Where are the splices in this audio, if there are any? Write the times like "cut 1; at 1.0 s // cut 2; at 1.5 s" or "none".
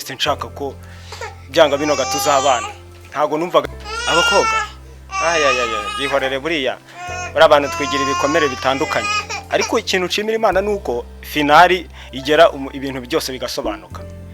cut 1; at 3.6 s